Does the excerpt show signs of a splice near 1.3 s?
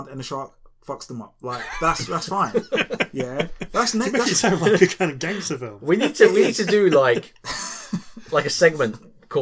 yes; 1 cut; at 1.3 s

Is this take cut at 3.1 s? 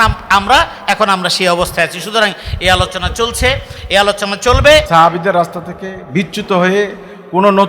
no; 1 cut; at 4.9 s

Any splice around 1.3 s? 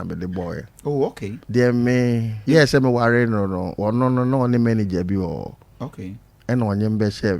yes; 3 cuts; at 1.3 s, 2.3 s, 3.7 s

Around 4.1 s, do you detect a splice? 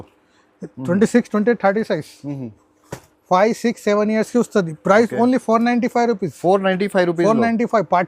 no; 0 cuts

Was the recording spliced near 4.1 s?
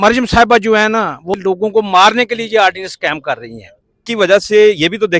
yes; 2 cuts; at 1.3 s, 4.1 s

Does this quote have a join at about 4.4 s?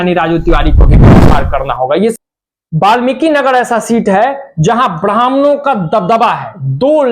no; 1 cut; at 2.1 s

